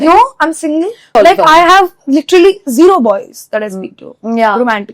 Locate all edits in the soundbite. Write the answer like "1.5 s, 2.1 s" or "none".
1.1 s